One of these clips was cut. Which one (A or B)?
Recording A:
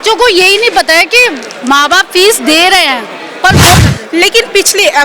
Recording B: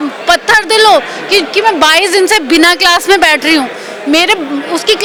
A